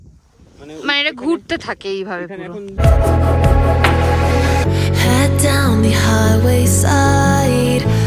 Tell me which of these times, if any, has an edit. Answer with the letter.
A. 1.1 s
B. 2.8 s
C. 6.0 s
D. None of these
B